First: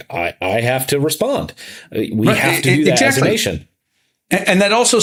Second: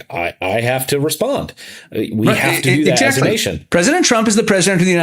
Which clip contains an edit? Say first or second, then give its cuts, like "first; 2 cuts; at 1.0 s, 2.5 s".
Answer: second; 1 cut; at 3.5 s